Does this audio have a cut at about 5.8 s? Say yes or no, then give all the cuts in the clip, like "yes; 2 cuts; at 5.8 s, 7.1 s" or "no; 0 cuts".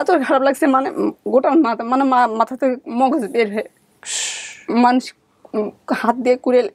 no; 0 cuts